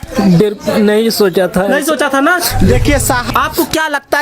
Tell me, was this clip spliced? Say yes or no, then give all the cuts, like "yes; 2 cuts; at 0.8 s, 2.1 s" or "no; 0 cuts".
yes; 1 cut; at 3.3 s